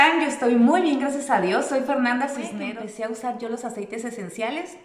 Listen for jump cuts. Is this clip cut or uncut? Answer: cut